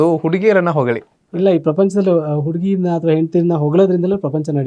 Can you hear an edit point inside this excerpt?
yes; 1 cut; at 1.3 s

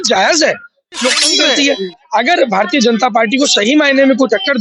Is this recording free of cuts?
no; 1 cut; at 1.4 s

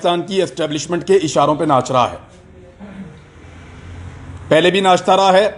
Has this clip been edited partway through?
no; 0 cuts

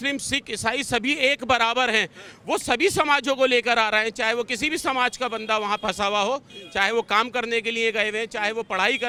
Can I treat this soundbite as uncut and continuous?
yes; 0 cuts

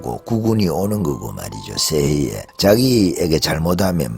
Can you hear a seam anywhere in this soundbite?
yes; 1 cut; at 2.4 s

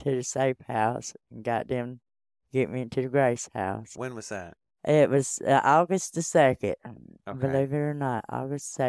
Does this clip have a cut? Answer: no; 0 cuts

